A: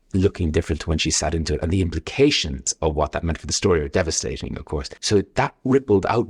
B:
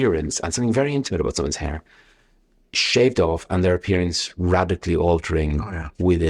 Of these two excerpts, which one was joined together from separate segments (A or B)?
A